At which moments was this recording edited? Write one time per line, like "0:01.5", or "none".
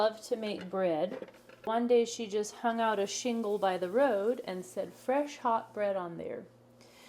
0:01.7